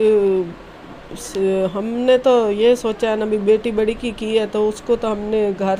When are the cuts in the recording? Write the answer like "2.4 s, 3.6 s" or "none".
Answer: none